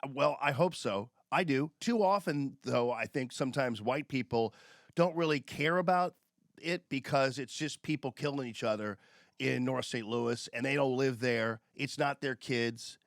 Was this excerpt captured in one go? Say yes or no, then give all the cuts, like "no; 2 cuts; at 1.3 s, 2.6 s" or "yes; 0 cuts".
no; 1 cut; at 1.8 s